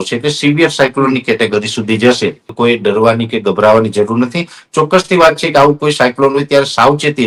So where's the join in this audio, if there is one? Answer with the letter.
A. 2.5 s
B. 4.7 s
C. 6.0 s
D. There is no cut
A